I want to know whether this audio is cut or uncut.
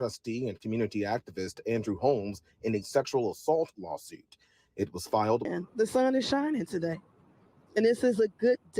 cut